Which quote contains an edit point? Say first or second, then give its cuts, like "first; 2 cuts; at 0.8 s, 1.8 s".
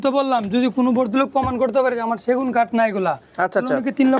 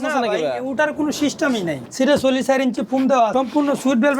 second; 2 cuts; at 1.8 s, 3.3 s